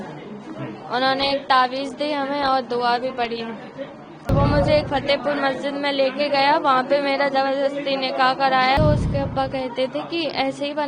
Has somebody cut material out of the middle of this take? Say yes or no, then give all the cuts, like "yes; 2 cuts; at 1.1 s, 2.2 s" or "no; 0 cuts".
yes; 2 cuts; at 4.3 s, 8.8 s